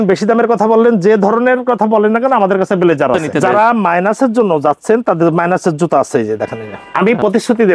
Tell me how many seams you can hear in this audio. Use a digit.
2